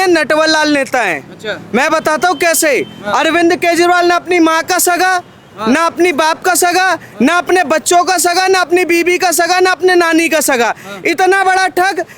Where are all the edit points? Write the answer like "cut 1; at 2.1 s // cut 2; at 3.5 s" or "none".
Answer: none